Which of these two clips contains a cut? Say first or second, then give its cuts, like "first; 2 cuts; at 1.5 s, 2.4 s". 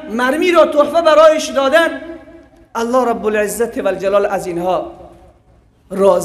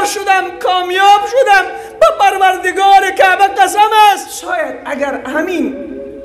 second; 1 cut; at 4.6 s